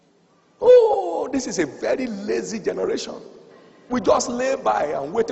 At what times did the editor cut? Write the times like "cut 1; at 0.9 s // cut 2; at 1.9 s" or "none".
none